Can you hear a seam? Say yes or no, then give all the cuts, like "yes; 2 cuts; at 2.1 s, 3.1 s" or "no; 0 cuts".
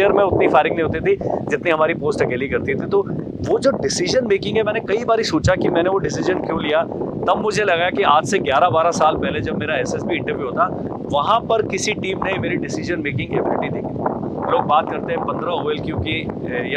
no; 0 cuts